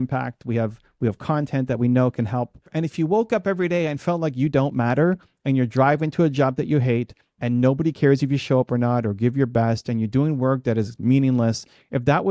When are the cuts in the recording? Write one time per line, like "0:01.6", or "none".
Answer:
0:02.7